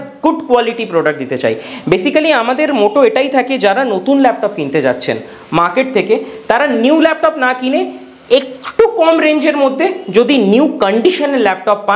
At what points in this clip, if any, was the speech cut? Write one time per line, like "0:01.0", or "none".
none